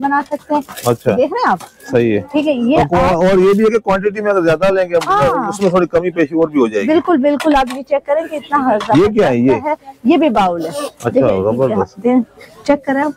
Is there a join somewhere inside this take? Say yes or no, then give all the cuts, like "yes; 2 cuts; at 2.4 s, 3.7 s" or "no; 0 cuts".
no; 0 cuts